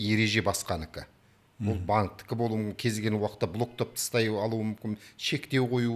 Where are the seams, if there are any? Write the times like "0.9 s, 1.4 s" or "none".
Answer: none